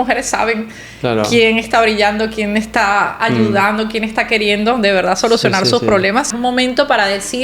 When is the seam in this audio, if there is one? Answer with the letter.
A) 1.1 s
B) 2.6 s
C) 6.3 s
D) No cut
C